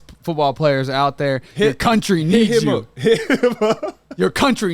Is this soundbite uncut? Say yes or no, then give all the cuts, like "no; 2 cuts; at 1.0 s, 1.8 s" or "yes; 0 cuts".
yes; 0 cuts